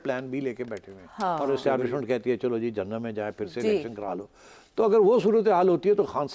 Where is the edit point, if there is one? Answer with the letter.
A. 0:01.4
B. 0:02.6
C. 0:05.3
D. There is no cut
A